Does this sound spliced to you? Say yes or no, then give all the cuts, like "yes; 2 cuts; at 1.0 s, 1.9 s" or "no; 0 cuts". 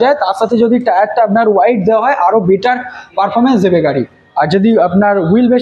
no; 0 cuts